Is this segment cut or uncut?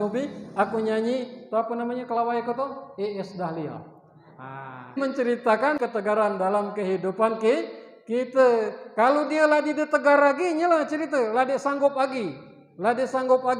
cut